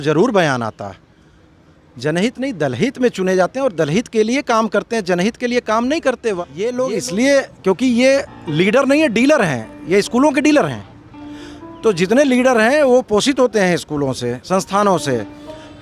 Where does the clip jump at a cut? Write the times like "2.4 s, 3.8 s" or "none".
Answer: 6.4 s